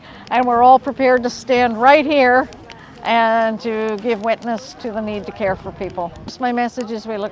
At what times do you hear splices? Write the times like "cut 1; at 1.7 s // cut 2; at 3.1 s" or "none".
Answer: cut 1; at 6.4 s